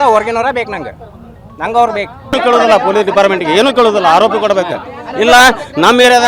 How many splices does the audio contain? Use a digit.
1